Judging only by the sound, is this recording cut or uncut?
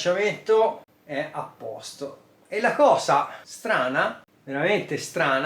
cut